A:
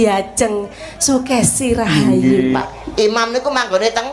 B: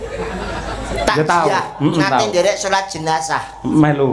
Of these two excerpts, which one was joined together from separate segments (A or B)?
A